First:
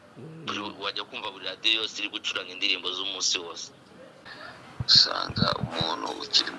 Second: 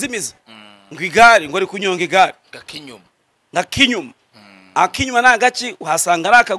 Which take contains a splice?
first; 1 cut; at 4.3 s

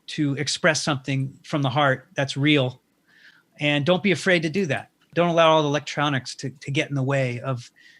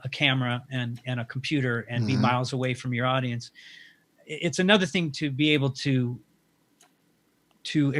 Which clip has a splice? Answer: first; 1 cut; at 5.1 s

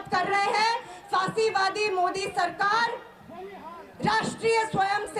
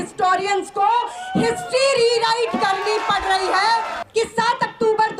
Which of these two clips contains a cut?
second; 1 cut; at 4.0 s

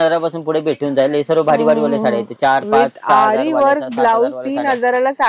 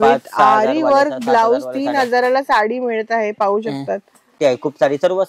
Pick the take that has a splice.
second; 1 cut; at 4.4 s

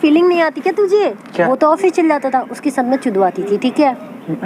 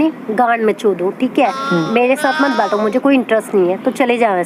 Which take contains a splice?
first; 1 cut; at 1.5 s

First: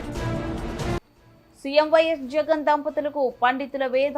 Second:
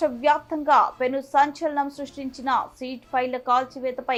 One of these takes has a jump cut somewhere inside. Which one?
first; 1 cut; at 1.0 s

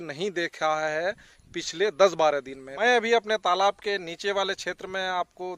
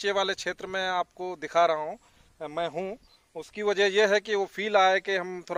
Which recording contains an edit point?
first; 1 cut; at 2.6 s

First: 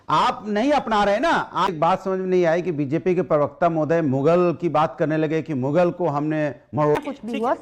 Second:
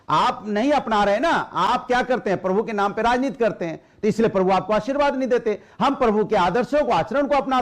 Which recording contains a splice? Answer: first; 2 cuts; at 1.7 s, 7.0 s

